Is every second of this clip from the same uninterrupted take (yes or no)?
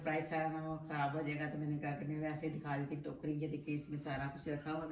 yes